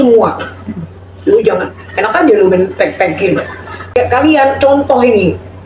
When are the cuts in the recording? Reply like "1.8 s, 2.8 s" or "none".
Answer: 3.9 s